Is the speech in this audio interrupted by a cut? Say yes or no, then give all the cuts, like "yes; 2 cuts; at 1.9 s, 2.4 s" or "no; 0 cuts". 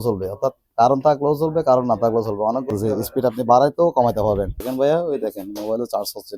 yes; 2 cuts; at 2.7 s, 4.6 s